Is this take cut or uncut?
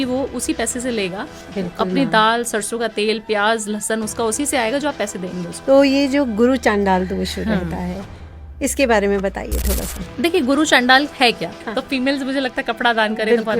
cut